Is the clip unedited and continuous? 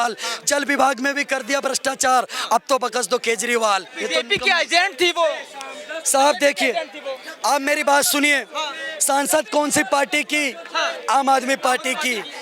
no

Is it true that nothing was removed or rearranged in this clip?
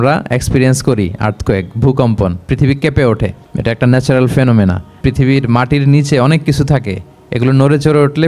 no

